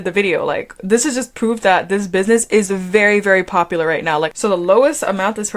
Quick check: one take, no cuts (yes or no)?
no